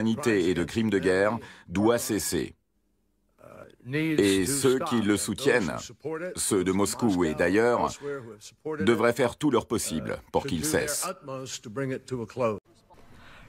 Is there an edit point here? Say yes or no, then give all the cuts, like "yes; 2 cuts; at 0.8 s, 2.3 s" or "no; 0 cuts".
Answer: yes; 1 cut; at 11.1 s